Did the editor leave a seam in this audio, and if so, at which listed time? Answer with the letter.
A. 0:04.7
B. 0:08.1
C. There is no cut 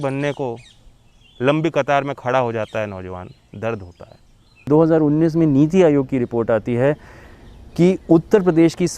A